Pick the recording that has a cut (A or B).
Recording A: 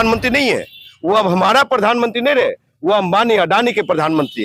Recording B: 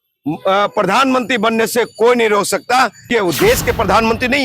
B